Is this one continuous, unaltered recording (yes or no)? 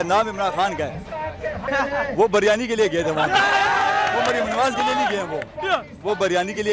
no